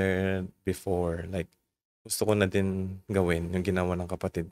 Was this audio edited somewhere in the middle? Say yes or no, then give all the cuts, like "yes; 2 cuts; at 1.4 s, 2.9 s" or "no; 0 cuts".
no; 0 cuts